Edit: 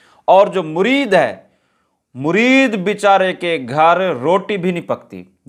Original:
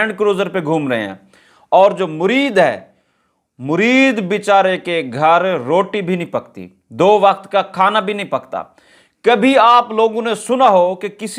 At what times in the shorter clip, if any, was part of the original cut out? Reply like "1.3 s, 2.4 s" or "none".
none